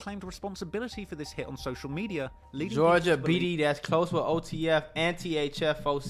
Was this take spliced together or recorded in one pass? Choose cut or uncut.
uncut